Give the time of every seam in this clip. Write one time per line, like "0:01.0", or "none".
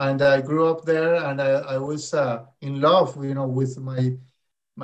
none